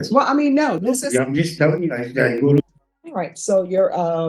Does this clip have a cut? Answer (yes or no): yes